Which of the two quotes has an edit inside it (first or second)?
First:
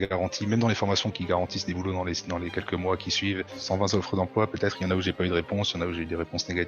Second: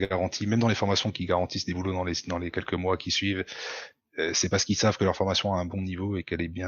first